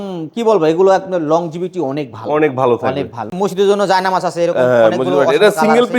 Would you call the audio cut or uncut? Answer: cut